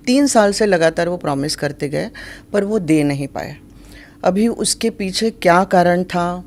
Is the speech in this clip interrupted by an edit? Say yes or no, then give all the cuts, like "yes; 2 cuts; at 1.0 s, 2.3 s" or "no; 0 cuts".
no; 0 cuts